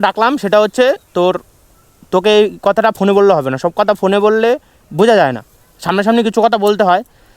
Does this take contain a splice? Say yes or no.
no